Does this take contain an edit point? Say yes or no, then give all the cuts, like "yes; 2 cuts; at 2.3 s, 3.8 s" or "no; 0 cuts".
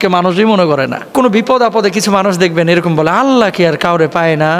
yes; 1 cut; at 1.1 s